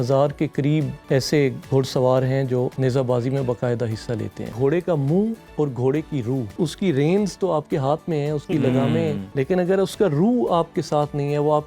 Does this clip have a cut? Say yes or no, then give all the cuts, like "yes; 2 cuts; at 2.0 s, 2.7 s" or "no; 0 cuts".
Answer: yes; 6 cuts; at 1.0 s, 2.7 s, 4.5 s, 5.4 s, 6.5 s, 9.2 s